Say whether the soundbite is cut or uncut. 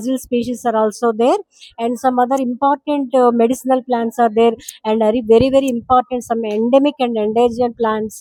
uncut